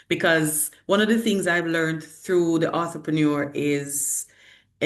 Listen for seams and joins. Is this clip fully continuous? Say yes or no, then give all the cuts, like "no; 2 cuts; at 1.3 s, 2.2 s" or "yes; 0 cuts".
yes; 0 cuts